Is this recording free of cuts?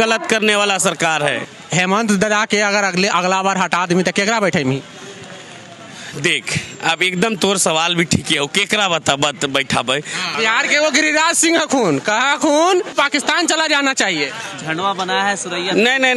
no; 2 cuts; at 1.4 s, 10.3 s

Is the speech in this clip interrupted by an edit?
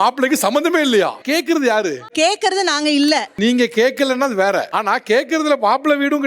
no; 0 cuts

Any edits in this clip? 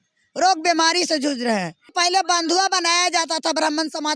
yes; 1 cut; at 1.8 s

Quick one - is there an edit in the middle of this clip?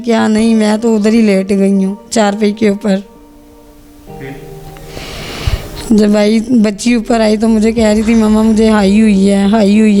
no; 0 cuts

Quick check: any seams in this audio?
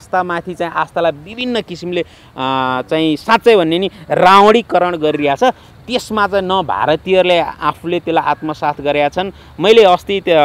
no; 0 cuts

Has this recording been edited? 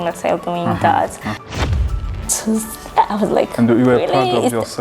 yes; 1 cut; at 1.7 s

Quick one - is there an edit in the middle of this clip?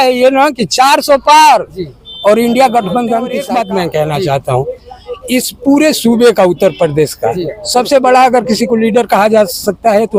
yes; 1 cut; at 3.4 s

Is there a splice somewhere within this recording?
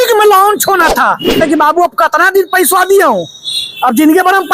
yes; 1 cut; at 1.4 s

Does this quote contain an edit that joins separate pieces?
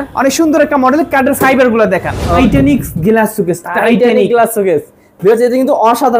yes; 1 cut; at 2.4 s

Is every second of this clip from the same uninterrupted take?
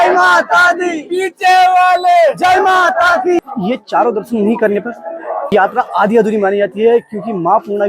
no; 2 cuts; at 3.4 s, 5.5 s

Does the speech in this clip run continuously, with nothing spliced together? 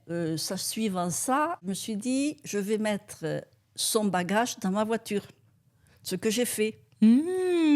no; 1 cut; at 1.6 s

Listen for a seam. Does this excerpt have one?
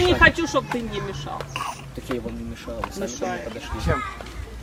no; 0 cuts

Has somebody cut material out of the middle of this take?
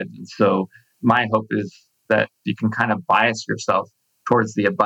yes; 1 cut; at 2.4 s

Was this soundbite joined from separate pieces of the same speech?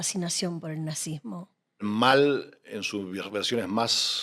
yes; 1 cut; at 1.8 s

